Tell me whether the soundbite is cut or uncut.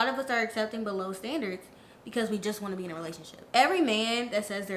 uncut